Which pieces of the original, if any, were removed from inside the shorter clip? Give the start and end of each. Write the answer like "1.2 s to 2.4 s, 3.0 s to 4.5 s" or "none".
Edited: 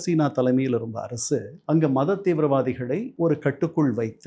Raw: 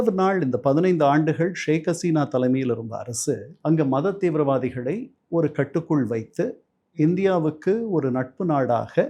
5.1 s to 5.2 s